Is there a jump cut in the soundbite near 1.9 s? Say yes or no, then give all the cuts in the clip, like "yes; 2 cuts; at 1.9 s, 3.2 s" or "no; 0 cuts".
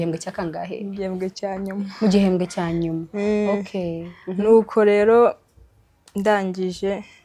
no; 0 cuts